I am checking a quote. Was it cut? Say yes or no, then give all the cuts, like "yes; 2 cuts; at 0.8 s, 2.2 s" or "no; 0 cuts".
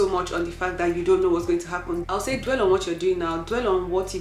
no; 0 cuts